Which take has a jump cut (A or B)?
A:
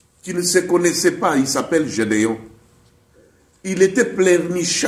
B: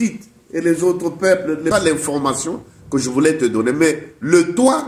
B